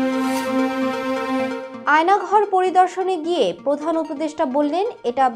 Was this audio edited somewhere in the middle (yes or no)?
yes